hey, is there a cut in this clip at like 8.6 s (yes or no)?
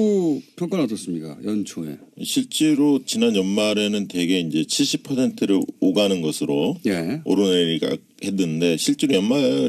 no